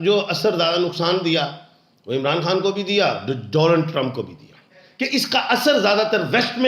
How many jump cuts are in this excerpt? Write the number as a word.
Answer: one